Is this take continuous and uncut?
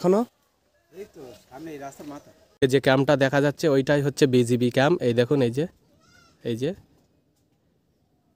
no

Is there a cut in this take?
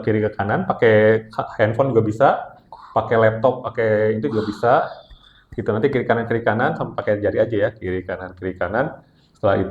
no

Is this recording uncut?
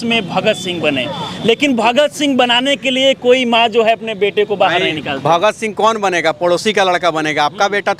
yes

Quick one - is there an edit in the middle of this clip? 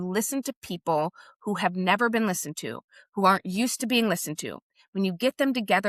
no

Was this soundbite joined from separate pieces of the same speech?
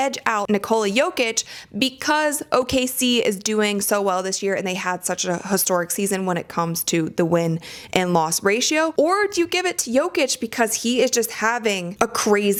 no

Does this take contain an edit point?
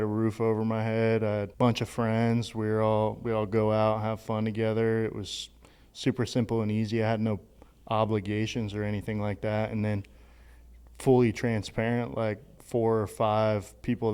yes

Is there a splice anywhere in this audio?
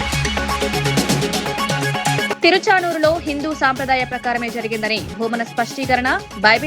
yes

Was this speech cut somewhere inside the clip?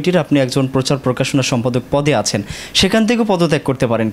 no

